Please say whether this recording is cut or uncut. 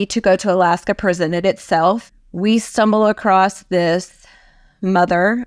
cut